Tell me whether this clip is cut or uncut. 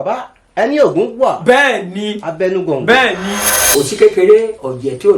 cut